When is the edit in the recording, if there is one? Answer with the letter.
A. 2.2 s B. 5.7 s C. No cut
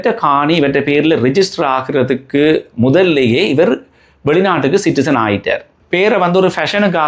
B